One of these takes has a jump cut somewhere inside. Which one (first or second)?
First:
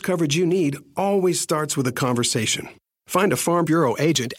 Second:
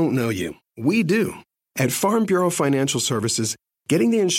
second